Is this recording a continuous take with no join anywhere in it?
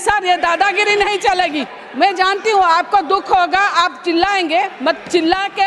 no; 1 cut; at 1.8 s

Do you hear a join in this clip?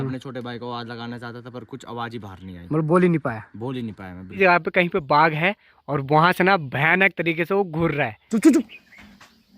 yes; 2 cuts; at 4.4 s, 8.2 s

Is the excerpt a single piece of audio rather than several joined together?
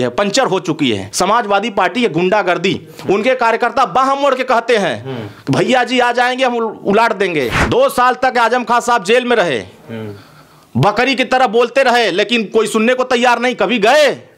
no; 2 cuts; at 1.1 s, 7.6 s

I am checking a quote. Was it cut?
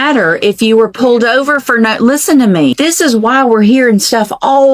yes; 1 cut; at 2.7 s

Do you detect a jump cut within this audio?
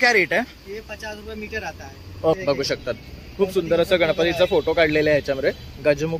yes; 1 cut; at 2.4 s

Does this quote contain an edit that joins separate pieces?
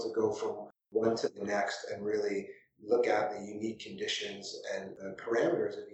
yes; 1 cut; at 5.0 s

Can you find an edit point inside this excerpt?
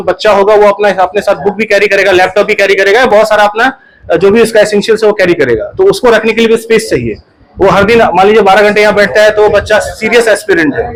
no; 0 cuts

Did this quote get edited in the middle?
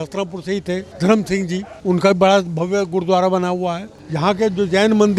no; 0 cuts

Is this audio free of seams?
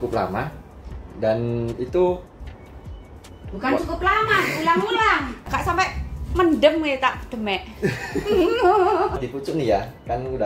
no; 2 cuts; at 5.4 s, 9.2 s

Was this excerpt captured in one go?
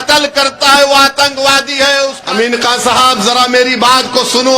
no; 1 cut; at 2.2 s

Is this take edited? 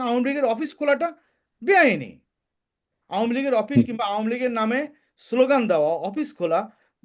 no; 0 cuts

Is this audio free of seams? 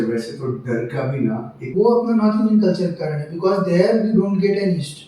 no; 1 cut; at 1.6 s

